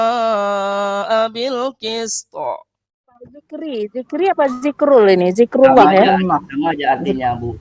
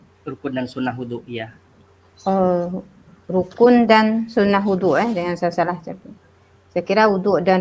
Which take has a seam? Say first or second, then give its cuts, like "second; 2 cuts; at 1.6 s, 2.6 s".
first; 1 cut; at 3.4 s